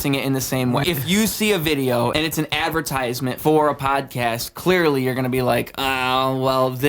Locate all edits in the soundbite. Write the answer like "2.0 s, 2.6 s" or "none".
0.8 s, 2.1 s, 3.4 s